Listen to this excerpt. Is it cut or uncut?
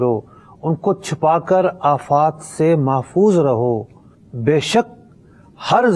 uncut